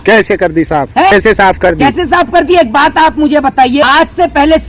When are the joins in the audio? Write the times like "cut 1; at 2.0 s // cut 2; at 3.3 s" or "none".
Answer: cut 1; at 1.1 s // cut 2; at 3.8 s